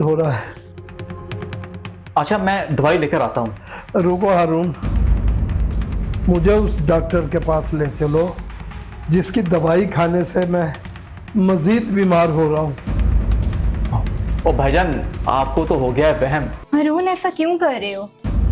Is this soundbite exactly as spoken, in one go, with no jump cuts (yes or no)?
no